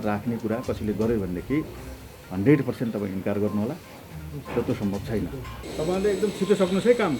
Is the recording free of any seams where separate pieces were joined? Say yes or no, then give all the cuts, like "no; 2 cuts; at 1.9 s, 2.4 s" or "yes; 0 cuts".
no; 1 cut; at 5.6 s